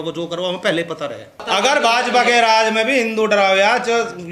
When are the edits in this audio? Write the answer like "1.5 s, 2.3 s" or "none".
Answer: 1.4 s